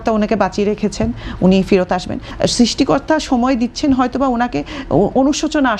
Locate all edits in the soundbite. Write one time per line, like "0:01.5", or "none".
0:02.3